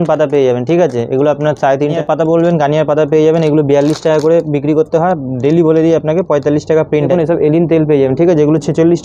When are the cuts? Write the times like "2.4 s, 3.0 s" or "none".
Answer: 2.0 s, 7.1 s